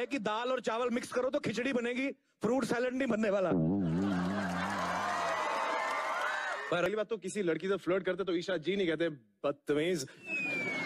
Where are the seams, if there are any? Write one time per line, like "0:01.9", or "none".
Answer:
0:06.9